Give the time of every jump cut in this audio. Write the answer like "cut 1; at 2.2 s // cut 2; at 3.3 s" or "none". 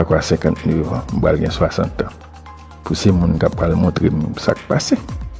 none